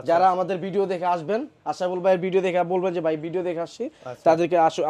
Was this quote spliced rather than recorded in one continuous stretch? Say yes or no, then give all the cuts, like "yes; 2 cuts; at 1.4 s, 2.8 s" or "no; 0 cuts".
no; 0 cuts